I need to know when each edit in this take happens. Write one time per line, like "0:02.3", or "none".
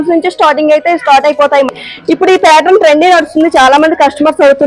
0:01.8